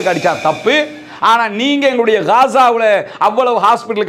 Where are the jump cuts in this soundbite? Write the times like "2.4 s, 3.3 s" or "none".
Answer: none